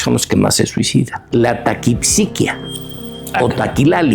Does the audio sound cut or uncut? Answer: cut